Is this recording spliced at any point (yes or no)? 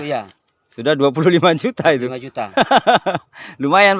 no